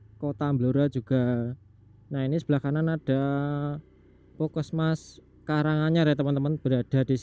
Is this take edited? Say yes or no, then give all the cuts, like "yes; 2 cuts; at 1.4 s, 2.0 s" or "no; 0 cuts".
no; 0 cuts